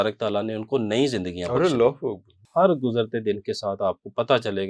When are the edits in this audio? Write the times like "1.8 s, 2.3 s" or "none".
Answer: 2.4 s